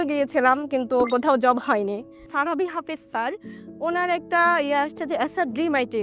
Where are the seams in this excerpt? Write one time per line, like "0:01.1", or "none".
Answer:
none